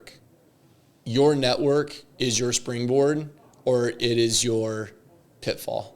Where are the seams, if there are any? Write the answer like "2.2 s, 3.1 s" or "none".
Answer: none